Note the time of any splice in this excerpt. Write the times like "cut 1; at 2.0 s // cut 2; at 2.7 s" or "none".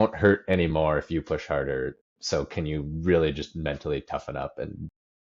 none